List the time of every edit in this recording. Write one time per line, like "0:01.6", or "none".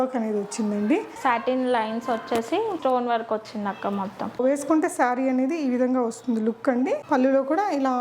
0:01.1
0:02.8
0:04.4